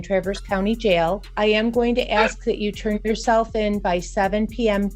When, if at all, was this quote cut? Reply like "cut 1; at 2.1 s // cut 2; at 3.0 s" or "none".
cut 1; at 1.3 s